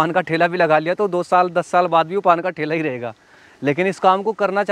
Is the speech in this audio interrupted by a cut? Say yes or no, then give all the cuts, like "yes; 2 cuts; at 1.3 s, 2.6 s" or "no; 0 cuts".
no; 0 cuts